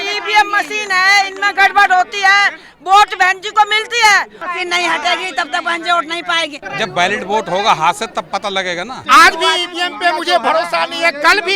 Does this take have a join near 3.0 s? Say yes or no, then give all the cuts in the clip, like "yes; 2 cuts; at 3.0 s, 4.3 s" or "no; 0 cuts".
no; 3 cuts; at 4.4 s, 6.6 s, 9.0 s